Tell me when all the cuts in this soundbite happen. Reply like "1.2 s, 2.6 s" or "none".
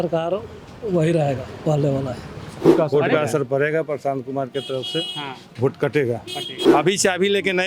2.6 s, 6.6 s